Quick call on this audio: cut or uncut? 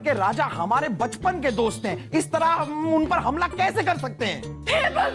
uncut